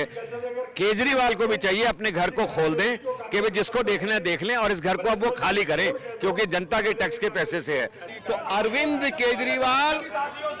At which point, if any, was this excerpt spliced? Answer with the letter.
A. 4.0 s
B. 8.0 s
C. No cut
B